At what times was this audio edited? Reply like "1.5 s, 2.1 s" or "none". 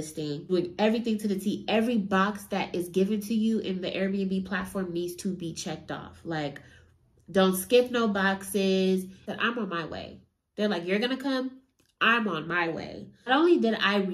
9.3 s